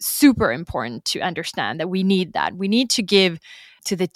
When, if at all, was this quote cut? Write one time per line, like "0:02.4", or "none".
none